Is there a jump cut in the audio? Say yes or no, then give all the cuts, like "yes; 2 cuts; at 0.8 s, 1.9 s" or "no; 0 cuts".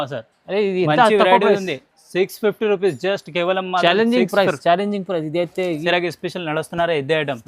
yes; 1 cut; at 5.8 s